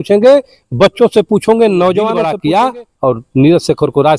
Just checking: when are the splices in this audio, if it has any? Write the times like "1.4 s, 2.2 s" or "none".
2.3 s